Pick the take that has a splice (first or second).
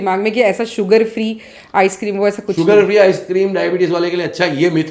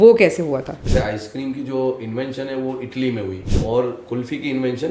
second